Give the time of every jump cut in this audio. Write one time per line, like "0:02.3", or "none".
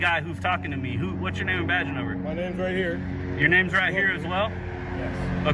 none